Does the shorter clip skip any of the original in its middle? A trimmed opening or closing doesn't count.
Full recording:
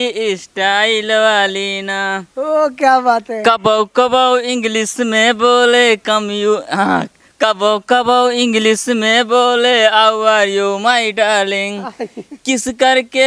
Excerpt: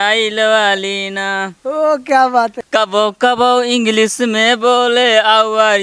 yes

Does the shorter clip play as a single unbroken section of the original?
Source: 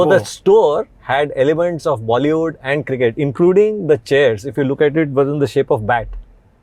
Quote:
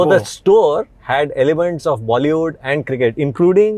yes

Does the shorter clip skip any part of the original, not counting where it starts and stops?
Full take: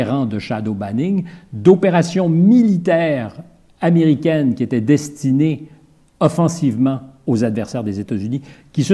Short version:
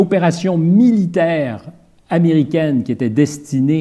no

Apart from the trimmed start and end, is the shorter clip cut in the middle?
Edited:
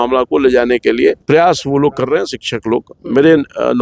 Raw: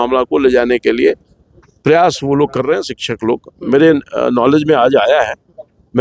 yes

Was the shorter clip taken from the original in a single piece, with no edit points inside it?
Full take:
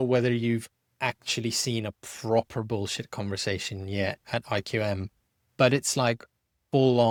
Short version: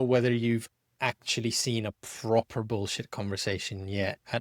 yes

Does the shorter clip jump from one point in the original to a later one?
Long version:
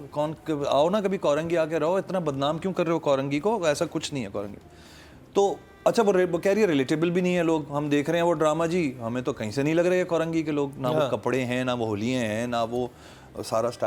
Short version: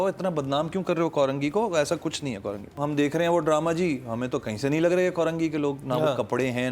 yes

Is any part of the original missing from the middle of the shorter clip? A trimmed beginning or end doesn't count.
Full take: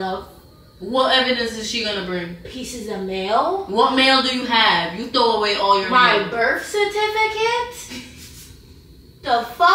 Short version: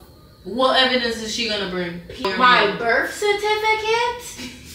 yes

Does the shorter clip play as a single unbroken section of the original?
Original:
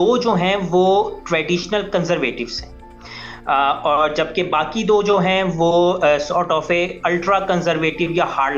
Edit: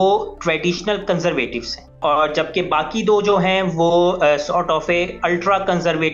no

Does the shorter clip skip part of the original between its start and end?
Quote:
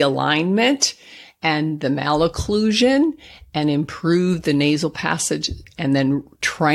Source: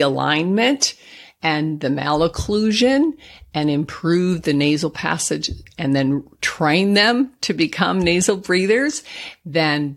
no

